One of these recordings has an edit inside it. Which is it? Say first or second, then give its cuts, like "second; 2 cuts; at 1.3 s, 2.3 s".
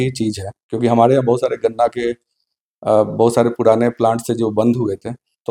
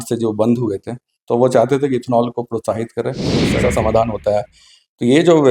second; 1 cut; at 3.5 s